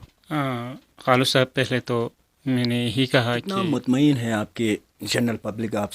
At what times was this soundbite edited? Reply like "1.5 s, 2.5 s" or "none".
3.5 s